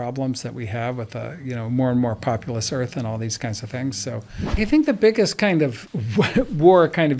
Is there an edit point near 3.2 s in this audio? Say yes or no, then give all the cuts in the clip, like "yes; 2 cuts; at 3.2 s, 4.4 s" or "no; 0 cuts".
no; 2 cuts; at 4.6 s, 5.9 s